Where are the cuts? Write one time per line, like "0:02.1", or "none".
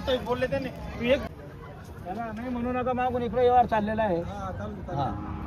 0:01.3